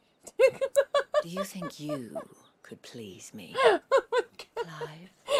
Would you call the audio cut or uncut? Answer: uncut